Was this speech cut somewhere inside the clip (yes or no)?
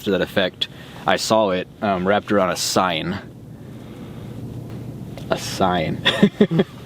yes